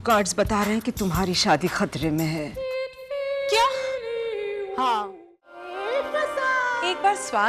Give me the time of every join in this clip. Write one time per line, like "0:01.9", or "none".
0:05.7